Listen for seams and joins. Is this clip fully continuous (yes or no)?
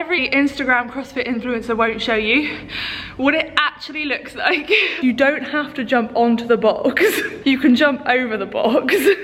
no